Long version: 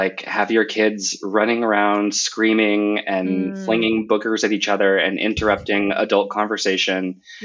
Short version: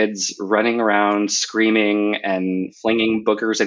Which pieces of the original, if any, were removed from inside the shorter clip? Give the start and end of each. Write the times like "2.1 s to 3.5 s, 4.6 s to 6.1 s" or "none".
none